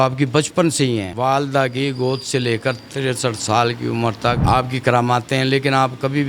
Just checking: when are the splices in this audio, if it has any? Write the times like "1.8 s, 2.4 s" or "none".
1.1 s, 4.4 s